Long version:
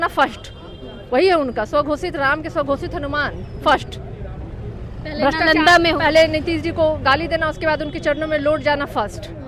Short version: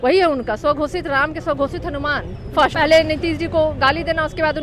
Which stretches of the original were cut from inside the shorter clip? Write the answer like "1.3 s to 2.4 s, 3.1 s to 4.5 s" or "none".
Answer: 3.8 s to 6.0 s